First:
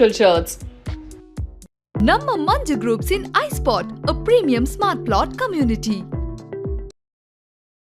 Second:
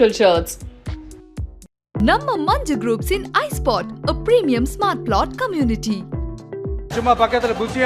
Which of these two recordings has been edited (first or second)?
second